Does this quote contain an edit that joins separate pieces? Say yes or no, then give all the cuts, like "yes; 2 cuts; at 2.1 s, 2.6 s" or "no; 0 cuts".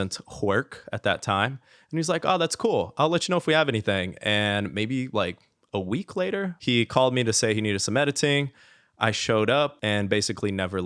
yes; 2 cuts; at 6.5 s, 9.8 s